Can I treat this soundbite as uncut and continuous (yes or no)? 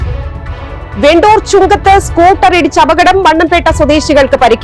no